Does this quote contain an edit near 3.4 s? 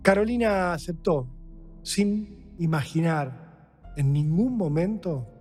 no; 0 cuts

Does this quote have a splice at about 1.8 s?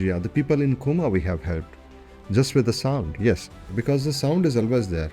no; 1 cut; at 3.7 s

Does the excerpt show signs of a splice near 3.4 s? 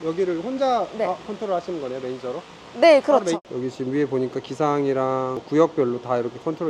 no; 0 cuts

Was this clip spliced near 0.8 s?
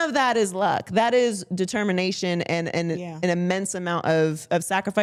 no; 0 cuts

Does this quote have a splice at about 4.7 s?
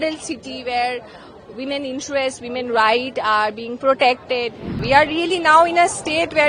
yes; 1 cut; at 4.7 s

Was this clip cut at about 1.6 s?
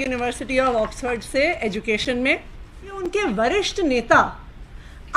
no; 1 cut; at 3.0 s

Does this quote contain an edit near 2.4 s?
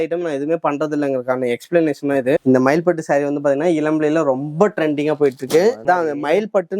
yes; 2 cuts; at 2.4 s, 5.8 s

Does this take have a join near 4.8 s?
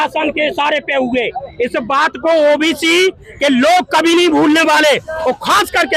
no; 0 cuts

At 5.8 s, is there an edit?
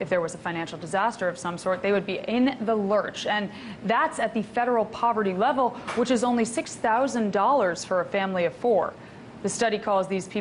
yes; 1 cut; at 5.8 s

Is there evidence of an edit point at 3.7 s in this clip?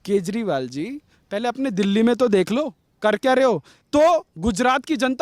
yes; 1 cut; at 3.7 s

